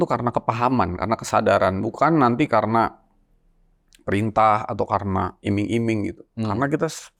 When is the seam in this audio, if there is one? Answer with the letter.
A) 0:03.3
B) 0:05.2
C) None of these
C